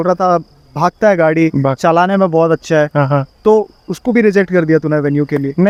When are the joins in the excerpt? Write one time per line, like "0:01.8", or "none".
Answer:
none

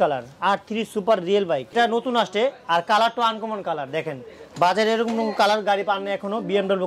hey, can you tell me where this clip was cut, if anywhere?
0:01.7

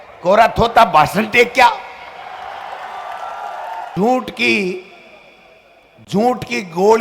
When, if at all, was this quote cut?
0:03.9

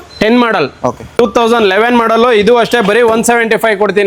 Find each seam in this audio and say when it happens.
0:01.2

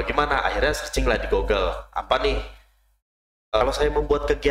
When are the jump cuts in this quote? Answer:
0:03.6

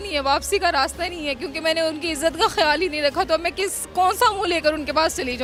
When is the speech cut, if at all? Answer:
none

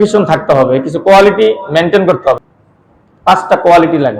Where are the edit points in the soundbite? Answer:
0:02.4

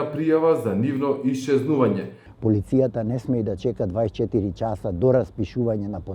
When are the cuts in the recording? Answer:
0:02.3

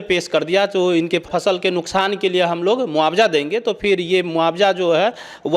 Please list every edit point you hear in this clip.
0:01.3

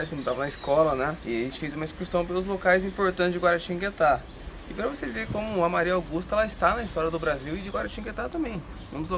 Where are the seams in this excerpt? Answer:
0:01.2

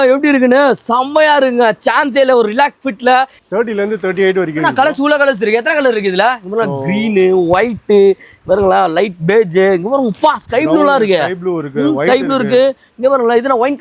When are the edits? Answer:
none

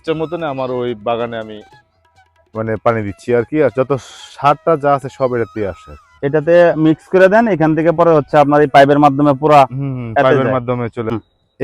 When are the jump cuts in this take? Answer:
none

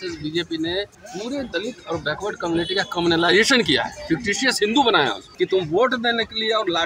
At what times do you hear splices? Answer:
0:01.0
0:05.2

